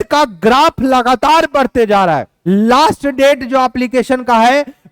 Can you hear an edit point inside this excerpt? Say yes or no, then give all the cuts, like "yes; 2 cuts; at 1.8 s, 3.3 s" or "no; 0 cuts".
yes; 1 cut; at 2.3 s